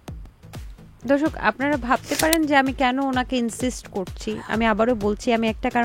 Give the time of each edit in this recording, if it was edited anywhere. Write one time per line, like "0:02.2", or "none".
0:00.9